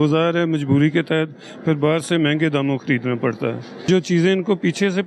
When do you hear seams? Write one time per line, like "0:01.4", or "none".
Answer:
0:03.9